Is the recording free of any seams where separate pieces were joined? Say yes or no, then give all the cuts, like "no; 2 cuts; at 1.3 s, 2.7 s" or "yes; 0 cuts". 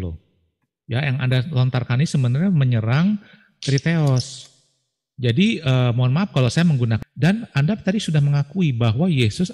no; 1 cut; at 7.0 s